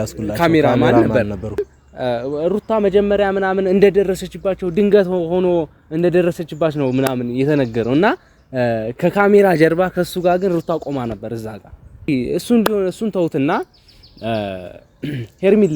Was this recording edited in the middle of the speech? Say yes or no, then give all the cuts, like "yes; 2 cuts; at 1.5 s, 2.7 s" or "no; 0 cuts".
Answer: yes; 2 cuts; at 1.6 s, 12.1 s